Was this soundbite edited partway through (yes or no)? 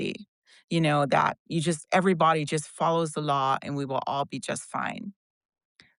no